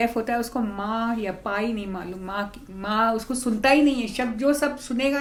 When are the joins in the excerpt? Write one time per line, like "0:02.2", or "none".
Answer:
none